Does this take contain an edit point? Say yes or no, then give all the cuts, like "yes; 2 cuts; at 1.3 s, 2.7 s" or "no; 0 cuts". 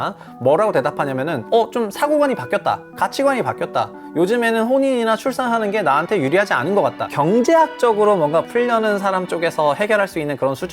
yes; 2 cuts; at 7.1 s, 8.5 s